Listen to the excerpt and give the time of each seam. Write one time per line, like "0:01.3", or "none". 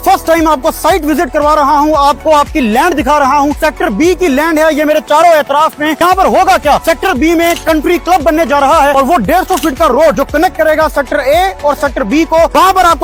none

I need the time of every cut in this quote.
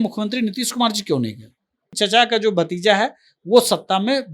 0:01.9

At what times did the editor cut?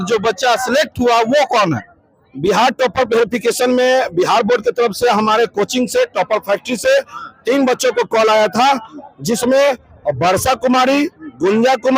none

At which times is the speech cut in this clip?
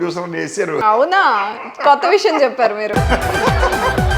0:00.8
0:02.9

